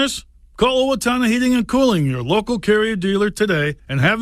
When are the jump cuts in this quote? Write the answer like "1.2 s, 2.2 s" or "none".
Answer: none